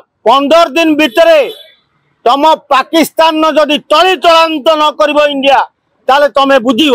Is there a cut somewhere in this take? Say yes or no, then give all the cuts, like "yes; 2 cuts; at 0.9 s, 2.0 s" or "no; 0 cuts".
no; 0 cuts